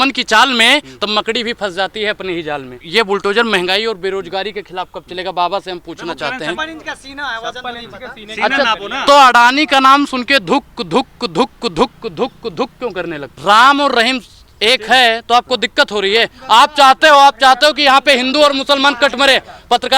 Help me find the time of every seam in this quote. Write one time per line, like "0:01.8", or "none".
0:02.8
0:06.6
0:13.3